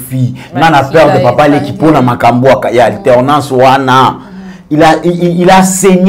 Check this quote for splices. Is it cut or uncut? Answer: uncut